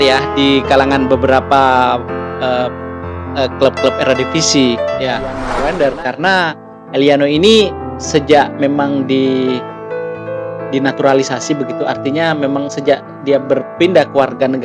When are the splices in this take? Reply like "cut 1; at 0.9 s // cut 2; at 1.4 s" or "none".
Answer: cut 1; at 5.4 s